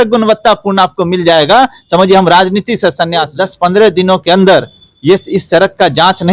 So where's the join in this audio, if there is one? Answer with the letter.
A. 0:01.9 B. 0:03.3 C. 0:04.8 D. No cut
B